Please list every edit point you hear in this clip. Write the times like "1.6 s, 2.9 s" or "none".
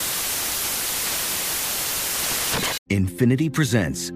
2.8 s